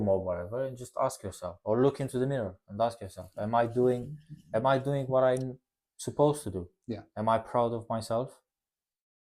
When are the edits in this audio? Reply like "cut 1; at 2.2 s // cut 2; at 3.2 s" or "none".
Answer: none